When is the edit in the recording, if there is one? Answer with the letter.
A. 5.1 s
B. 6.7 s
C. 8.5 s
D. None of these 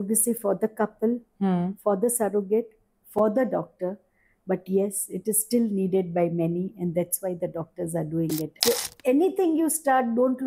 C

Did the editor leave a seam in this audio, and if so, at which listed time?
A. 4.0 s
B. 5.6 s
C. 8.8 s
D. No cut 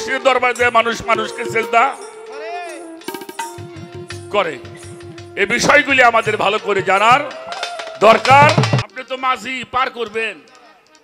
C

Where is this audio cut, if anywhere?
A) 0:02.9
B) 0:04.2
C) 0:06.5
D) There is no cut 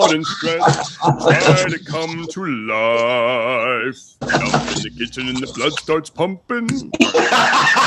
B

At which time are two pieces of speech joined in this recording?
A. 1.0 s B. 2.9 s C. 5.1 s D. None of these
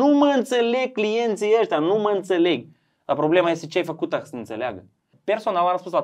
C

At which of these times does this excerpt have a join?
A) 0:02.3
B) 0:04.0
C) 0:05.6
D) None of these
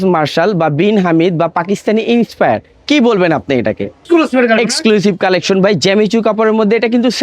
B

